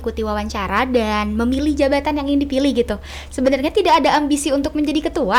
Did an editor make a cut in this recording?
no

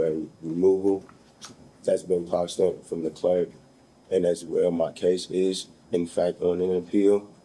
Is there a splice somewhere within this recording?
no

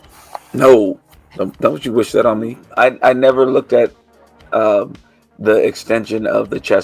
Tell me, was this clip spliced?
yes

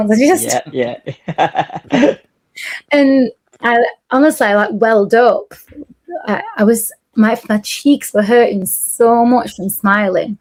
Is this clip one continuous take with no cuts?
yes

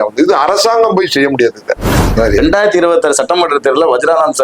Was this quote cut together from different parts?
yes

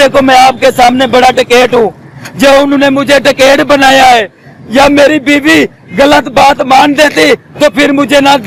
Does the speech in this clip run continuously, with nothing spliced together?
yes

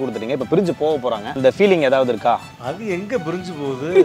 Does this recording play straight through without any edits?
no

